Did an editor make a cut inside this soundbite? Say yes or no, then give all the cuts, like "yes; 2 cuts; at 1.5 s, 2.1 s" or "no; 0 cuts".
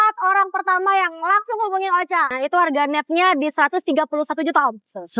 yes; 1 cut; at 2.3 s